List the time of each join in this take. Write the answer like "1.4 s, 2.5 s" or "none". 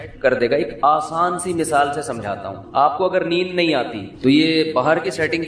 4.0 s